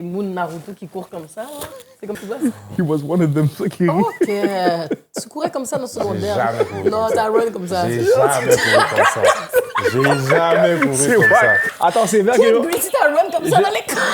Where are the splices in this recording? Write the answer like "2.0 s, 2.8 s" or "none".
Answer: 2.2 s, 11.7 s